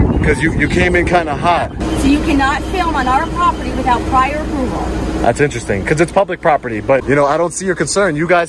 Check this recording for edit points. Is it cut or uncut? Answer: cut